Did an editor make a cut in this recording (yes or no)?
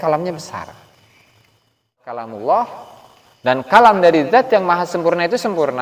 yes